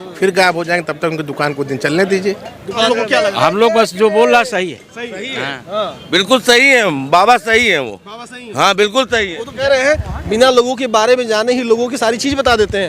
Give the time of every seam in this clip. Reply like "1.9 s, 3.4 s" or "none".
2.9 s, 9.4 s